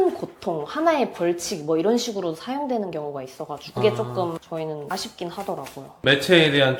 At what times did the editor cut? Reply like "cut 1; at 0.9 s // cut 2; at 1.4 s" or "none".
none